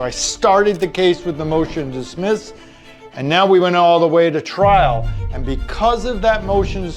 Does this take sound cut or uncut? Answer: uncut